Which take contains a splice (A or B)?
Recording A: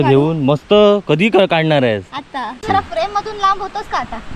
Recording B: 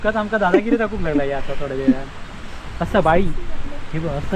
A